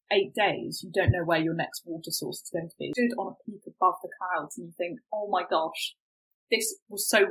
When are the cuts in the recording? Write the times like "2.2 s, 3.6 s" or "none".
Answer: 2.9 s